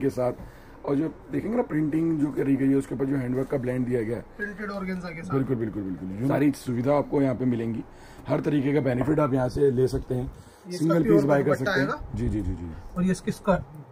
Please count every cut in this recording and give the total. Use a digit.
1